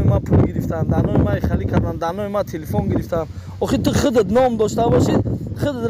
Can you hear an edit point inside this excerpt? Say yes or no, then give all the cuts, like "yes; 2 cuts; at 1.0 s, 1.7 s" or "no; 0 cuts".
no; 0 cuts